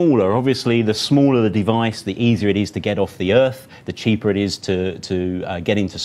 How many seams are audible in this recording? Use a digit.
1